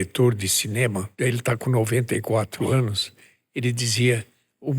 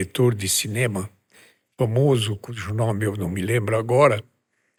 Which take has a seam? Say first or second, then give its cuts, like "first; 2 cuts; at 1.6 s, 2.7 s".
first; 1 cut; at 1.1 s